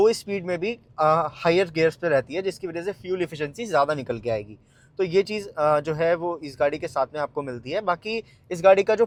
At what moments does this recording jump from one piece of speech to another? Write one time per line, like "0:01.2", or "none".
none